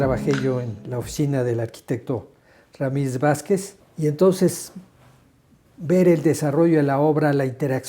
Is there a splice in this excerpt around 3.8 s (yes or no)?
yes